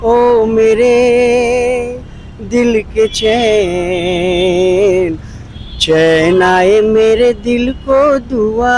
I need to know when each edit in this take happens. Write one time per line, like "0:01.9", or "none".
none

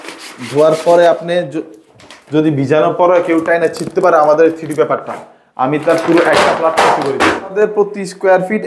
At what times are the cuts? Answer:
0:07.5

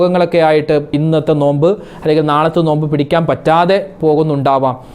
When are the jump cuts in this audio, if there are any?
0:00.9

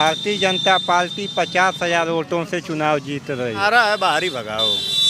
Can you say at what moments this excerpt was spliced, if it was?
0:03.6

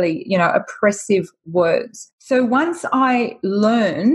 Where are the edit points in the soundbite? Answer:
none

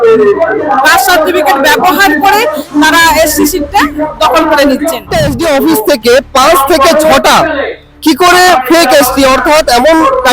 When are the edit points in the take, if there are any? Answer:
0:05.0

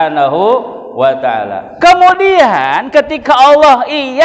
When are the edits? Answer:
0:01.6

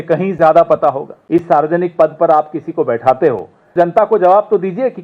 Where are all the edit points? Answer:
0:01.1
0:03.7

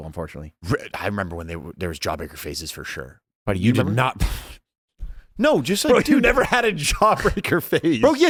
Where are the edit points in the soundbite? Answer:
none

